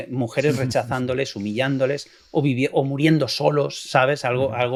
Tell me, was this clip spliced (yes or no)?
no